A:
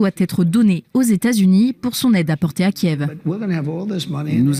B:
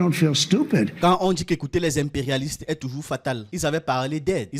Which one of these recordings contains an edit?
B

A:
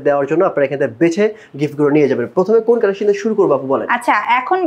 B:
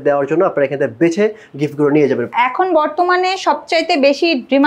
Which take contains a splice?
B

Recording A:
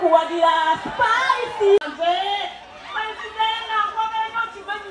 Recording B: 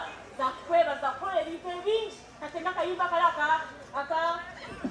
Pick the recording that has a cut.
A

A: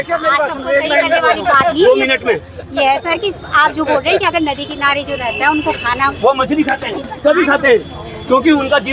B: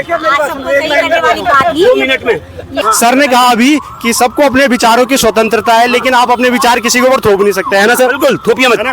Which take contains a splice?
B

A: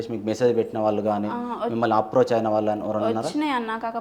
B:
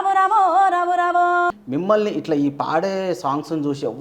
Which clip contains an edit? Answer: B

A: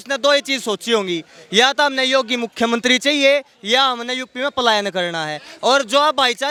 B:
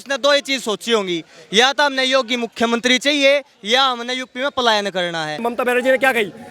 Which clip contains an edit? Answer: B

